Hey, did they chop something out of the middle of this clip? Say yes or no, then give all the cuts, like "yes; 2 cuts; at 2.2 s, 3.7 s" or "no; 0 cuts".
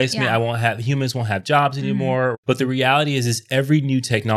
yes; 1 cut; at 2.3 s